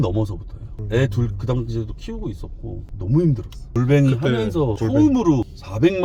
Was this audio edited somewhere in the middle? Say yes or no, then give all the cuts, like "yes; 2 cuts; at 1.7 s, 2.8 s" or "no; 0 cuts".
no; 0 cuts